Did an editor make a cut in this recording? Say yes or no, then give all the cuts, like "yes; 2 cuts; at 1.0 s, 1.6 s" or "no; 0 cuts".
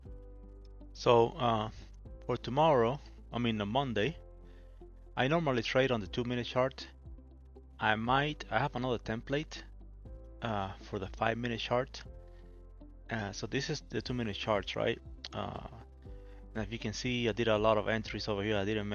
yes; 1 cut; at 1.0 s